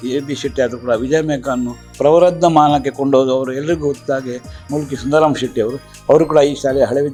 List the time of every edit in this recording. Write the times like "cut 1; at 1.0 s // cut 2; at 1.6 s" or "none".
none